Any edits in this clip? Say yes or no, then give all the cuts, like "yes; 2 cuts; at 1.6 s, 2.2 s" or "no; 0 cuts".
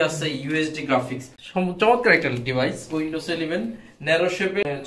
yes; 1 cut; at 1.3 s